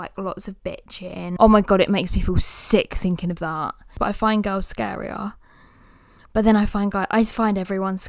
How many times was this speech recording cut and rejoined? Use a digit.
2